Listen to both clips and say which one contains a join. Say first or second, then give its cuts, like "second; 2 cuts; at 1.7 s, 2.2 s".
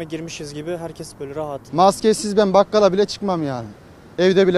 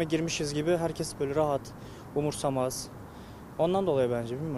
first; 1 cut; at 1.6 s